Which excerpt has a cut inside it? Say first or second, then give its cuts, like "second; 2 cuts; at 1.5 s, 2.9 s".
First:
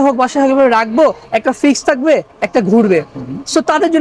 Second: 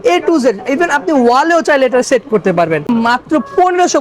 second; 1 cut; at 2.9 s